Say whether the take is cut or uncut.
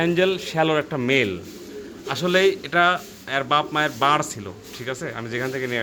uncut